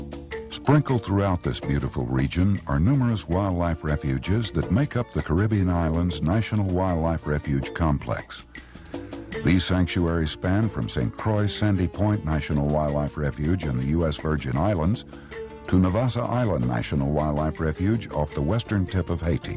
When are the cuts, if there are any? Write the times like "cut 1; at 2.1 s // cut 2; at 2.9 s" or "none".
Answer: cut 1; at 13.6 s